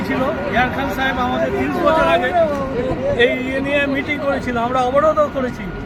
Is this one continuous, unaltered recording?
yes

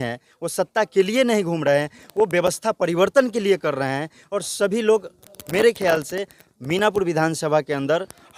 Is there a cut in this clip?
no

